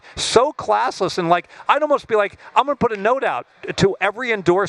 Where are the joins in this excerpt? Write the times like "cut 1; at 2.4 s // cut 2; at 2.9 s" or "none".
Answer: none